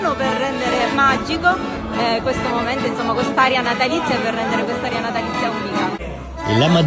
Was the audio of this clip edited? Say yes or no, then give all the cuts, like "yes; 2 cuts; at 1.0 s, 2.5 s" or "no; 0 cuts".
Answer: no; 0 cuts